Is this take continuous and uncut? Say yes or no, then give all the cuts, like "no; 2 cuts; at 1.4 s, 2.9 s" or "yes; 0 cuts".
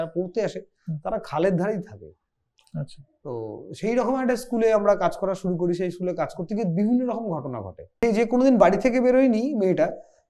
no; 1 cut; at 8.0 s